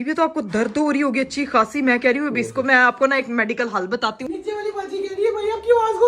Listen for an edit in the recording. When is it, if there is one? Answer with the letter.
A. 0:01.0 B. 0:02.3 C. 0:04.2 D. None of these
C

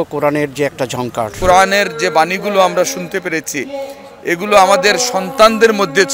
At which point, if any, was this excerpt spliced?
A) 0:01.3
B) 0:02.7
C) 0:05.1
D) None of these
A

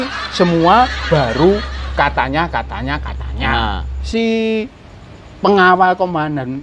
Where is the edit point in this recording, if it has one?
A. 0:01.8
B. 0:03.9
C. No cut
B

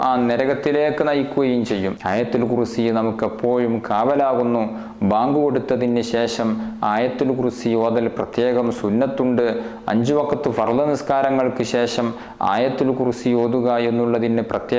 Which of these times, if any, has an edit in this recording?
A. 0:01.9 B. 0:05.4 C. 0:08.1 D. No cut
A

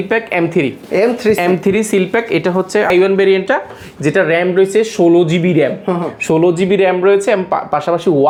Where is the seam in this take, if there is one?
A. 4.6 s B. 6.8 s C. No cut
C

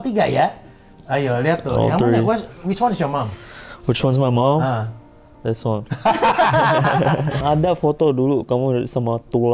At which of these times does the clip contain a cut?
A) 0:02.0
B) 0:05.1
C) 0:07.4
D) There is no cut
C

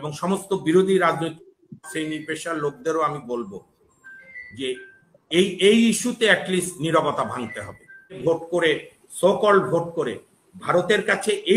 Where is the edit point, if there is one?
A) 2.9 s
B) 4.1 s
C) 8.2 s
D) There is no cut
C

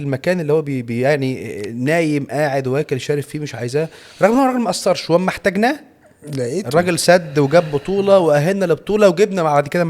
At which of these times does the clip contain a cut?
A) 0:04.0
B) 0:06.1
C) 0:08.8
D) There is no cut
D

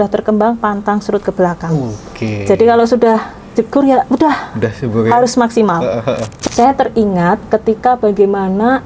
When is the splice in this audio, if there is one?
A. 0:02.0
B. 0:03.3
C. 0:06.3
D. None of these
C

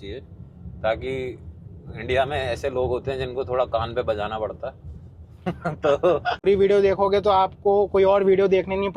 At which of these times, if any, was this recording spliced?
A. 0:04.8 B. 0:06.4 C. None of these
B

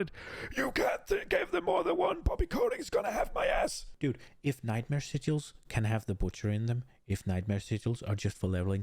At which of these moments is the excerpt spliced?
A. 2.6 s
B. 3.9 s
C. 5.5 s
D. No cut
B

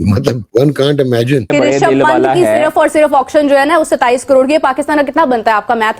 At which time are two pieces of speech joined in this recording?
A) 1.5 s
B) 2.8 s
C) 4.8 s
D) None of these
A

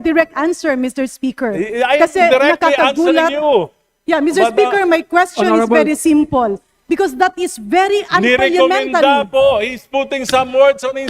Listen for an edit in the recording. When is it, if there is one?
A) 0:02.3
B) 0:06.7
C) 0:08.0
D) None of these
B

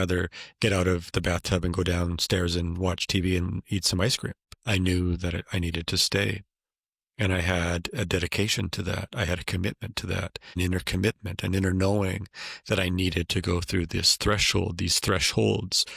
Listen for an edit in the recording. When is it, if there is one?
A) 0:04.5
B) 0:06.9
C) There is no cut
A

